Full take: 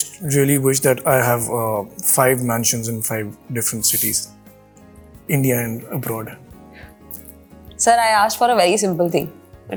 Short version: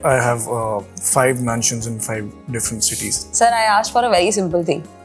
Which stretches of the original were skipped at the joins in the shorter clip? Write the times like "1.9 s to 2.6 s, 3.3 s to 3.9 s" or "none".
4.3 s to 7.7 s